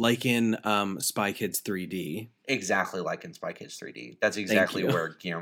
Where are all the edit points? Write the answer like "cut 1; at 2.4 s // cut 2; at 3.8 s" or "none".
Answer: cut 1; at 2.3 s